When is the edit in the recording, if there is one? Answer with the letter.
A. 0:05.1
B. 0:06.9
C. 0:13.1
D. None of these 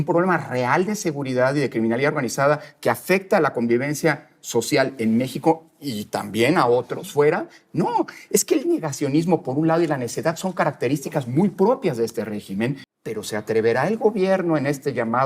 C